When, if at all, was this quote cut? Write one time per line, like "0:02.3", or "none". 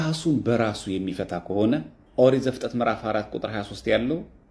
0:02.0

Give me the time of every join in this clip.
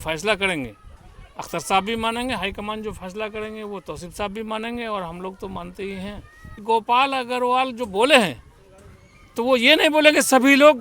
0:06.6

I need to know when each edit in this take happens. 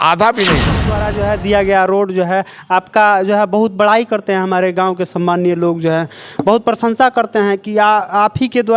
0:01.0

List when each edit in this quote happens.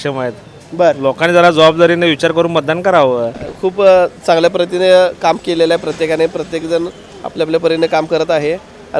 0:03.4

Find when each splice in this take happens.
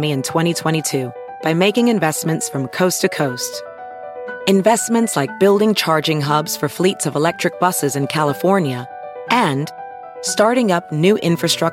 none

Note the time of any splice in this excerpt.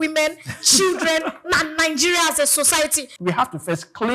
0:03.1

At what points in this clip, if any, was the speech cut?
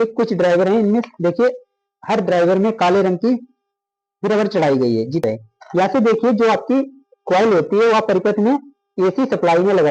0:05.2

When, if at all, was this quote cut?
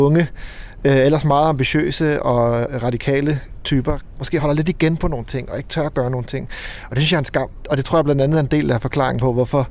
0:02.7
0:04.4
0:07.6

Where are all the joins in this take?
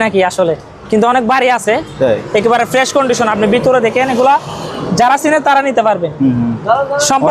none

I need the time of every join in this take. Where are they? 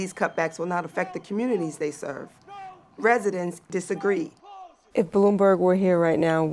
0:03.7
0:04.7

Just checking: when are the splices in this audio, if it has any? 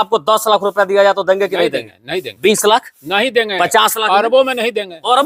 none

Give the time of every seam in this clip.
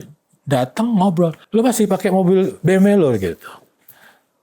0:01.4

